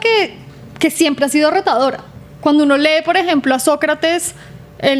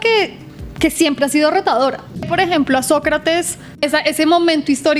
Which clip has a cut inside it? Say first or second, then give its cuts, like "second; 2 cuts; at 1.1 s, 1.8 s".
second; 2 cuts; at 2.3 s, 3.8 s